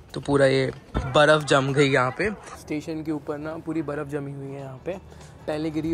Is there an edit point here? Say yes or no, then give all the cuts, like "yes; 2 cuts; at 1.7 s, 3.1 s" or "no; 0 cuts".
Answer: yes; 2 cuts; at 0.8 s, 2.5 s